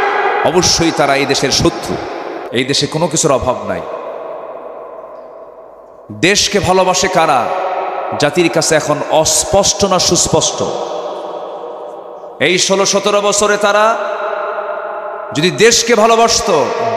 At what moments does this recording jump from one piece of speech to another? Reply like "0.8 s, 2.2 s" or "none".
2.4 s